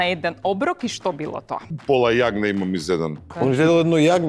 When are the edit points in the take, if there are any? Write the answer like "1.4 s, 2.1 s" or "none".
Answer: 1.7 s, 3.2 s